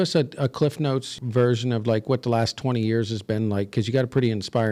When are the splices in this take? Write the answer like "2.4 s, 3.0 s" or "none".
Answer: 1.1 s